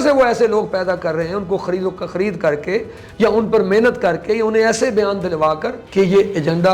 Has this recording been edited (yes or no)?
yes